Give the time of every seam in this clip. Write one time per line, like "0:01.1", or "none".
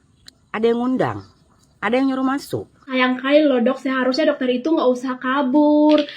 0:02.8